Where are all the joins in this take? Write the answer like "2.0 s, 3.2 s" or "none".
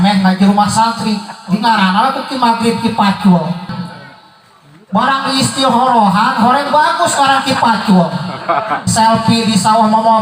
3.7 s, 8.8 s